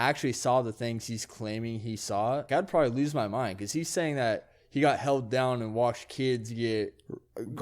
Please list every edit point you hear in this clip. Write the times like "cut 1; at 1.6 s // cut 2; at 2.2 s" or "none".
cut 1; at 2.5 s